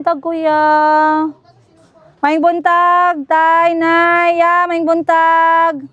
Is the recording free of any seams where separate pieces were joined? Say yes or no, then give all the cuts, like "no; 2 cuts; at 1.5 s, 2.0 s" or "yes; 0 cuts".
yes; 0 cuts